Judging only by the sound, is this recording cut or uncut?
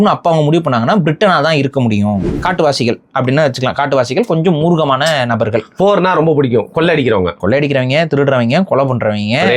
cut